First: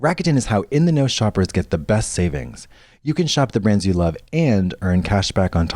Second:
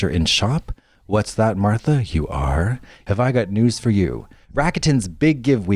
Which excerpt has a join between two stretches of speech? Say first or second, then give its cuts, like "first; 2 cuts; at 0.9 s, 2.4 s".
second; 1 cut; at 2.9 s